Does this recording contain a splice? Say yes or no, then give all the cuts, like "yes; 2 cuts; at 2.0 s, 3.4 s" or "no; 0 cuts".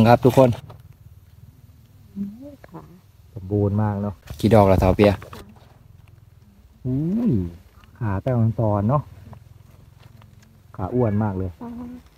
yes; 1 cut; at 4.2 s